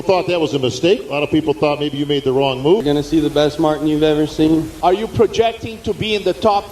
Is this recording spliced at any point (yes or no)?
yes